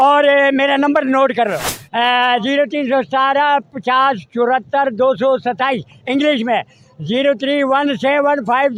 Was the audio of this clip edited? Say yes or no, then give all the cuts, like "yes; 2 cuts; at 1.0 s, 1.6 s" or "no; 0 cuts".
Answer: no; 0 cuts